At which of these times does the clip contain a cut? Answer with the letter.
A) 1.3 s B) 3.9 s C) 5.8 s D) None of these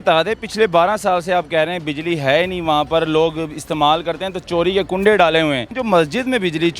C